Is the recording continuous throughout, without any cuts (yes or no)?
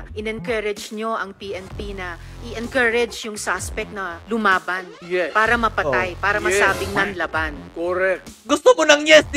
no